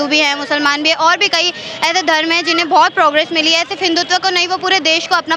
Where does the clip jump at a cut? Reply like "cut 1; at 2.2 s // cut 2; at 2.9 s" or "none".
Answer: none